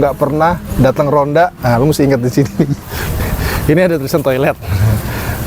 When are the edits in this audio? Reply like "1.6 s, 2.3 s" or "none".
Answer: 2.8 s